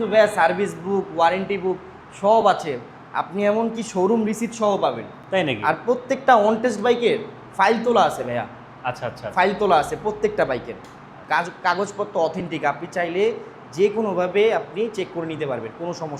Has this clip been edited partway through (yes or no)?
no